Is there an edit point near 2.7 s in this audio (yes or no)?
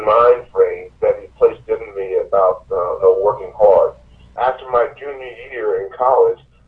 no